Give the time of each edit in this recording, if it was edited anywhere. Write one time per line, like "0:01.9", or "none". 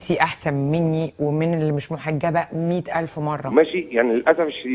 0:03.4